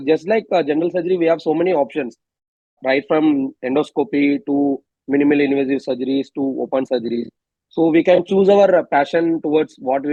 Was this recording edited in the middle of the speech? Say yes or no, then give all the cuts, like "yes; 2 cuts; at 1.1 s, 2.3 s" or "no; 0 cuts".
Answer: no; 0 cuts